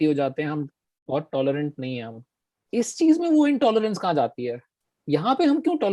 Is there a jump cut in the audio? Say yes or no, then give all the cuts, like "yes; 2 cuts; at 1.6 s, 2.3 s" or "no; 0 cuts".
yes; 1 cut; at 2.6 s